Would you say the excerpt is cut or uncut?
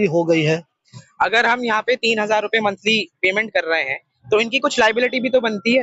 cut